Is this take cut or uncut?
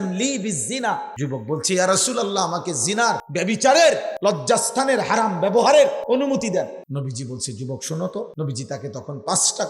cut